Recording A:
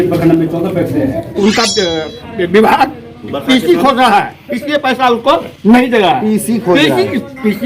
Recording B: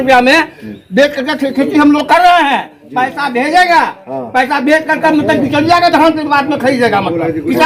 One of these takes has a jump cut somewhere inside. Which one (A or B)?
A